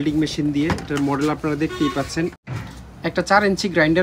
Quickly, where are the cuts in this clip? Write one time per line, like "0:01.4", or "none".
0:02.4